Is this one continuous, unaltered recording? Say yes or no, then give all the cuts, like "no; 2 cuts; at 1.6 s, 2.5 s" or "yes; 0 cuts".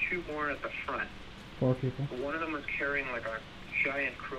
yes; 0 cuts